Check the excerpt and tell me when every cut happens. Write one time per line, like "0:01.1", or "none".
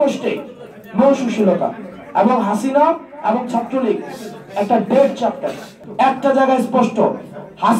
0:05.8